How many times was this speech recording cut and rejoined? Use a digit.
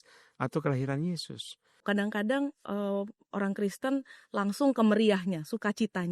1